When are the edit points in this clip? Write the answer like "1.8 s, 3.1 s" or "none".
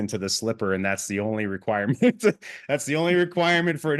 none